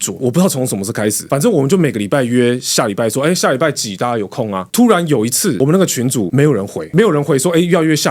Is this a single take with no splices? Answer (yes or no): yes